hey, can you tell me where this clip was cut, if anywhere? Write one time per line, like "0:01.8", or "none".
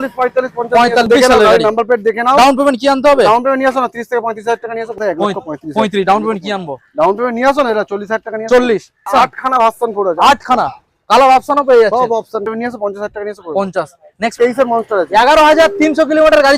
0:01.1
0:04.9
0:09.1
0:12.5
0:14.4